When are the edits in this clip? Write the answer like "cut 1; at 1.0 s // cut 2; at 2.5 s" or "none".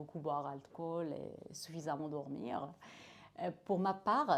none

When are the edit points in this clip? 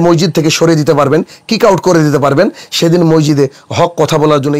none

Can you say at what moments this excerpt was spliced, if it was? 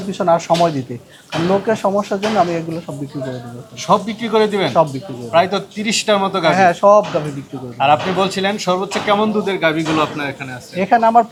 none

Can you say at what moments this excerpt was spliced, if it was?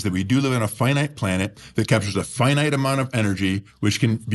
cut 1; at 1.6 s

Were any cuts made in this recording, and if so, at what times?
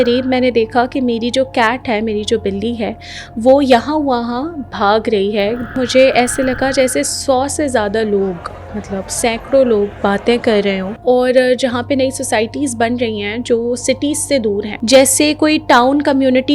cut 1; at 5.8 s // cut 2; at 10.9 s // cut 3; at 14.7 s

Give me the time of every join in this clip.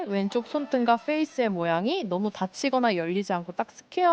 none

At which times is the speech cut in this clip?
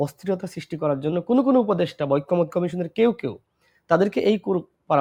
none

